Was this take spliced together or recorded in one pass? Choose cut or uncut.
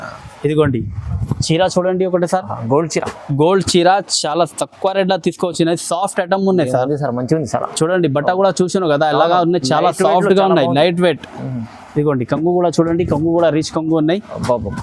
uncut